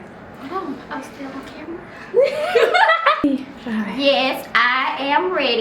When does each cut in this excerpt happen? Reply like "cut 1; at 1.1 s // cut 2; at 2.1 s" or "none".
cut 1; at 3.2 s

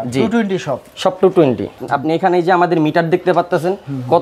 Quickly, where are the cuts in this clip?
cut 1; at 1.8 s

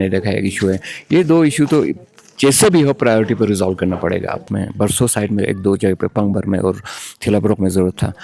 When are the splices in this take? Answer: cut 1; at 4.4 s

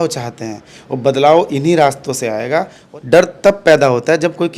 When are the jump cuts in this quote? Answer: cut 1; at 2.8 s

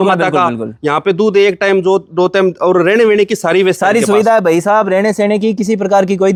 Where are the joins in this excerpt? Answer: none

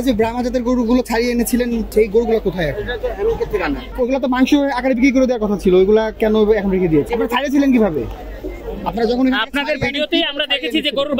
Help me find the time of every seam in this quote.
cut 1; at 1.9 s // cut 2; at 3.9 s // cut 3; at 7.1 s

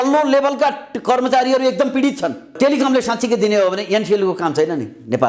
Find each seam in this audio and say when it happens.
cut 1; at 2.5 s

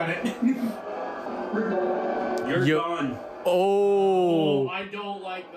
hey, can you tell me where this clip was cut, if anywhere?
cut 1; at 1.2 s

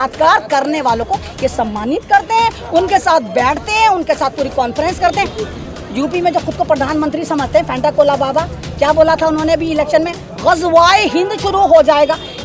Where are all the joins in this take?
cut 1; at 5.4 s

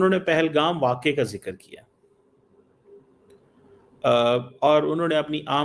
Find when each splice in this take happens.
none

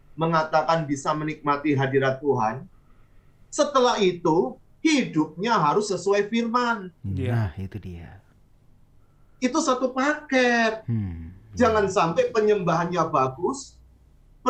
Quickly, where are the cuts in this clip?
none

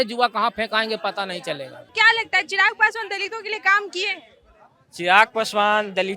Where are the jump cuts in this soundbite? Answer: cut 1; at 1.9 s

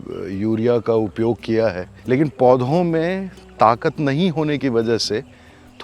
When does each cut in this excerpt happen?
cut 1; at 1.9 s

